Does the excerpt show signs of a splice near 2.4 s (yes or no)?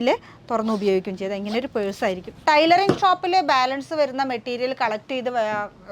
yes